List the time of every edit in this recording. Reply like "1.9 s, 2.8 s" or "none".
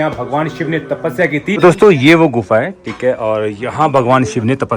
1.6 s